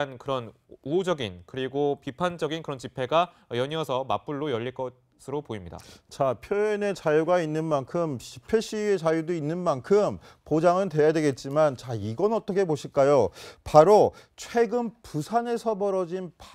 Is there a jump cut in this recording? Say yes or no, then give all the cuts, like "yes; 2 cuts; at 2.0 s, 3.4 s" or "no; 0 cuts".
no; 0 cuts